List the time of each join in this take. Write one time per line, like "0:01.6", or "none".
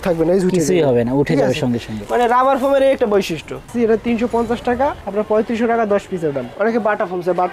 0:03.7
0:06.5